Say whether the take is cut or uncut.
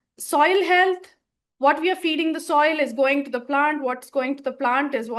uncut